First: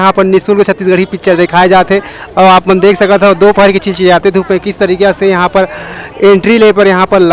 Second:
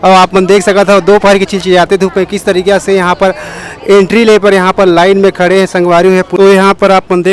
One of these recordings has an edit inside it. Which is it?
second; 1 cut; at 6.3 s

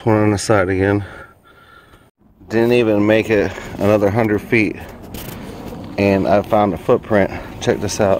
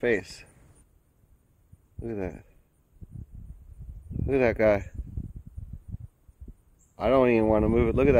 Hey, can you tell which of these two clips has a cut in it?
first; 1 cut; at 2.5 s

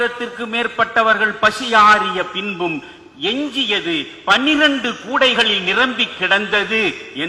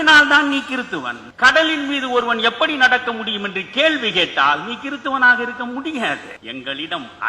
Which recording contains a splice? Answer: second; 2 cuts; at 1.2 s, 6.3 s

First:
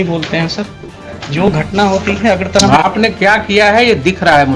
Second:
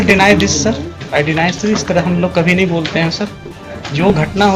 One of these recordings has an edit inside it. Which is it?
second; 1 cut; at 1.0 s

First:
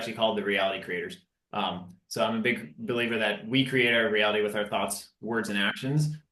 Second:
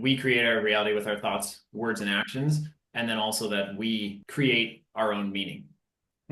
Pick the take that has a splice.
second; 1 cut; at 4.2 s

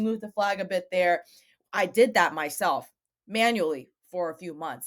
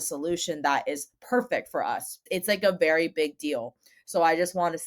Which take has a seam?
second; 1 cut; at 2.1 s

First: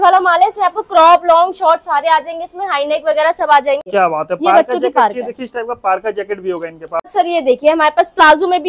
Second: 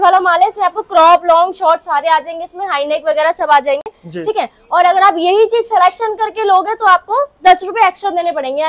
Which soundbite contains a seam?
first; 2 cuts; at 3.8 s, 7.0 s

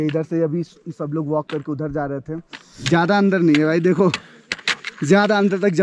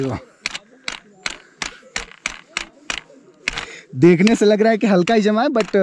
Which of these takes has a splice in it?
first; 1 cut; at 2.8 s

